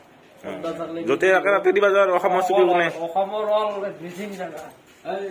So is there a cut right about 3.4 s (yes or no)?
no